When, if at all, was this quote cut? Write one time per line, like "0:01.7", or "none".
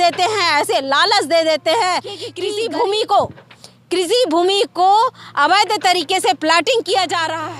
0:02.3